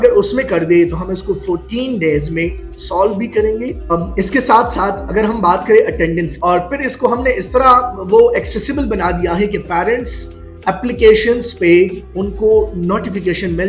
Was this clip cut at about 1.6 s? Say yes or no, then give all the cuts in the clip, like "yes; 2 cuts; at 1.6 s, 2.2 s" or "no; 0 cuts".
no; 2 cuts; at 3.9 s, 6.3 s